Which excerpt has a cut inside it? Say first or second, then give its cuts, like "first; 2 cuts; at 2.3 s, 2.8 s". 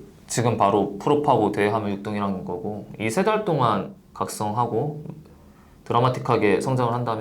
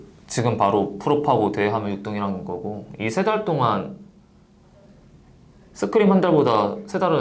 first; 1 cut; at 4.0 s